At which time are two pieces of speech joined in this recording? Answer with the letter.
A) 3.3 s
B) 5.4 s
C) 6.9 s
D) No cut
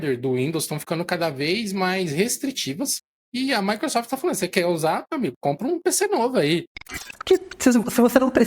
C